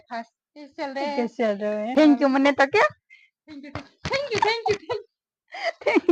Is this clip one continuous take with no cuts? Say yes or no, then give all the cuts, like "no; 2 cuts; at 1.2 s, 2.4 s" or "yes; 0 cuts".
yes; 0 cuts